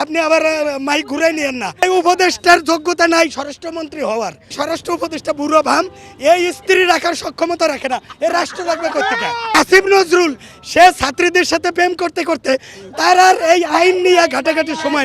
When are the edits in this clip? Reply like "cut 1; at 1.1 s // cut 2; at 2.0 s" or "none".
cut 1; at 1.8 s // cut 2; at 4.6 s // cut 3; at 9.5 s